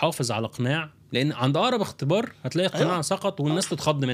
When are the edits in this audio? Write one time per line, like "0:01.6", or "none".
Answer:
none